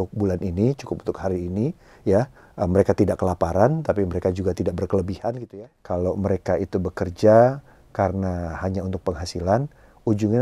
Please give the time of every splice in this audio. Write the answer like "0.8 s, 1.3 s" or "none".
5.4 s